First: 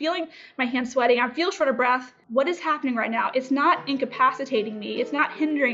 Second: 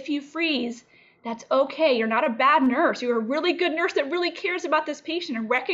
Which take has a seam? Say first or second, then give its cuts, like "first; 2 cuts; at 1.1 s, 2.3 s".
first; 1 cut; at 2.1 s